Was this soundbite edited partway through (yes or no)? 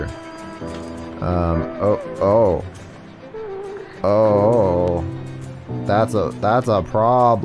no